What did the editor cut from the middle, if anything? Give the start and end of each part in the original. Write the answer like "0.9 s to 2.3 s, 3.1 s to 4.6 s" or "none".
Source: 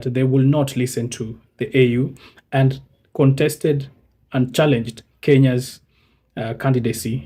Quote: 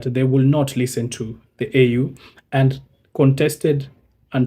none